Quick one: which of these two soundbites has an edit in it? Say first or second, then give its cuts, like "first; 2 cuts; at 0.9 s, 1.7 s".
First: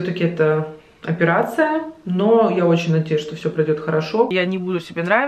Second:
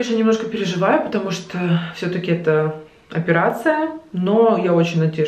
first; 1 cut; at 4.3 s